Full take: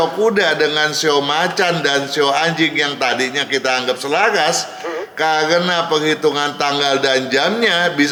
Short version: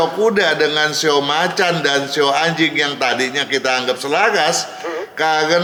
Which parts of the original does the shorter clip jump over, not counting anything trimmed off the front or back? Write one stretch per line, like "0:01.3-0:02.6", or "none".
none